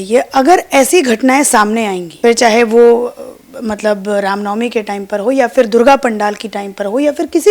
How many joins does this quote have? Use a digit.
1